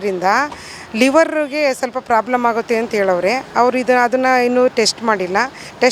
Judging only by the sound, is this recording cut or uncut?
uncut